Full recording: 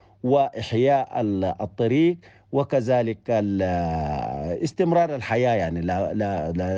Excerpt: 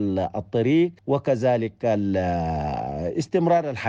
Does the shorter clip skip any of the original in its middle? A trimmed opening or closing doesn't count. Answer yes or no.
yes